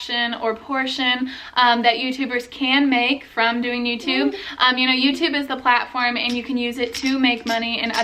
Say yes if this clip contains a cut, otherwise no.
no